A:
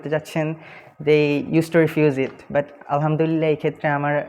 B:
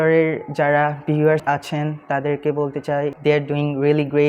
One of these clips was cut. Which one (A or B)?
B